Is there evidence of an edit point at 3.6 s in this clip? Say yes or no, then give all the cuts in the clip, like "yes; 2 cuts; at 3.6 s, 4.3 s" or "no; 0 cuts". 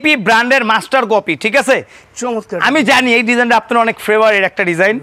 no; 1 cut; at 2.0 s